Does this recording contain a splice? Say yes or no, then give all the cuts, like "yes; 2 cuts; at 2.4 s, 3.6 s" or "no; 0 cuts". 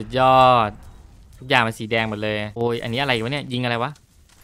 yes; 1 cut; at 2.5 s